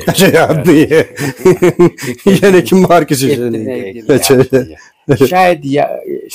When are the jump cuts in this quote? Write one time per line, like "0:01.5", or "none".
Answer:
none